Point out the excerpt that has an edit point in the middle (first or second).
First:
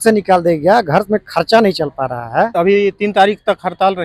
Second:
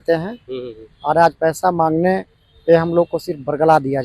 first